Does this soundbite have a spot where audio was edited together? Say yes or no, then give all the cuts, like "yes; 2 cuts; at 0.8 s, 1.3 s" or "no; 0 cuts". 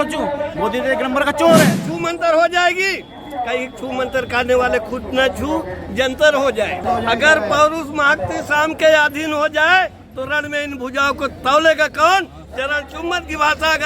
yes; 2 cuts; at 1.9 s, 6.8 s